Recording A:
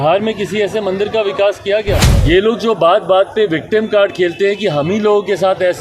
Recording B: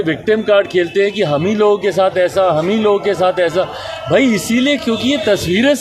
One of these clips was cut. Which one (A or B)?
A